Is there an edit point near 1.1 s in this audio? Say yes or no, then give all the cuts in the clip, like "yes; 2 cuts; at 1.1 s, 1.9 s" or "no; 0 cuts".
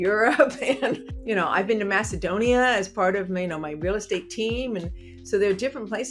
yes; 1 cut; at 1.1 s